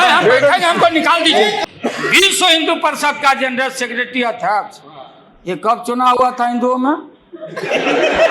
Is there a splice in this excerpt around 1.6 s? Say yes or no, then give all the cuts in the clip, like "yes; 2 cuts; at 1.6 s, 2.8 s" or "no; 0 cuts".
yes; 1 cut; at 1.6 s